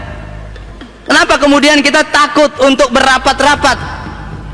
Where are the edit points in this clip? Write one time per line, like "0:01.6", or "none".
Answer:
none